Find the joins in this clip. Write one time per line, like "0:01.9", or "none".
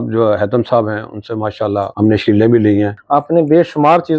0:01.9
0:03.0

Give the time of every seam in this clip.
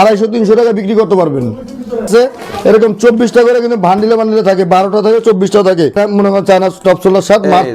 0:02.0
0:06.0

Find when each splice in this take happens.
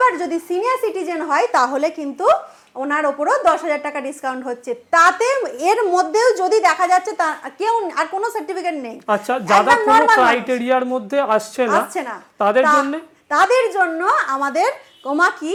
none

